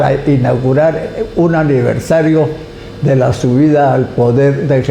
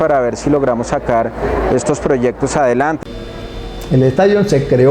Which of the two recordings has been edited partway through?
second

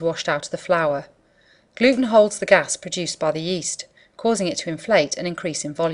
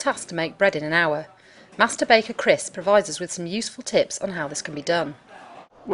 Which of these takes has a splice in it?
first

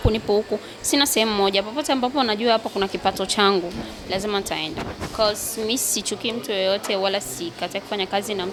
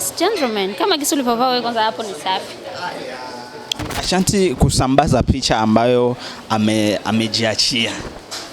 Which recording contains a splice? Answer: second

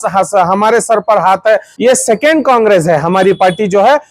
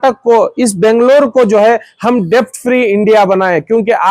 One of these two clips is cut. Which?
first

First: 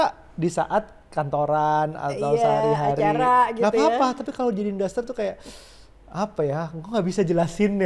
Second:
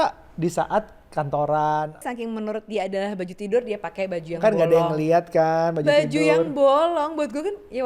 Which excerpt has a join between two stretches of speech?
second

